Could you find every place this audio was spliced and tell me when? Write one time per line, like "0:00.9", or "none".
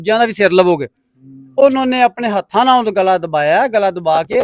none